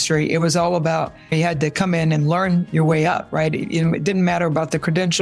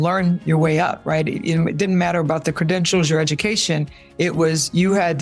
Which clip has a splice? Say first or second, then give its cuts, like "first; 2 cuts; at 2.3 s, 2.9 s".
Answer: first; 1 cut; at 1.3 s